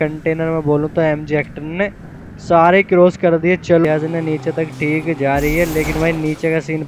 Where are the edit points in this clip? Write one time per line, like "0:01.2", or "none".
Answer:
0:03.8